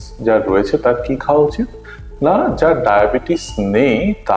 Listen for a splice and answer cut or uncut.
uncut